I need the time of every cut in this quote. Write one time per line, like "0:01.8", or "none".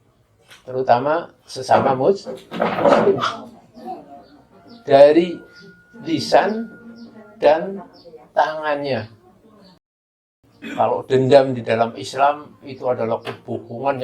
0:09.9